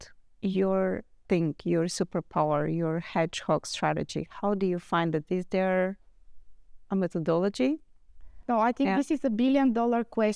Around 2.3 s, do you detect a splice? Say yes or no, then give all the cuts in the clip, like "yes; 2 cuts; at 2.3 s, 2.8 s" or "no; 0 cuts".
no; 1 cut; at 8.4 s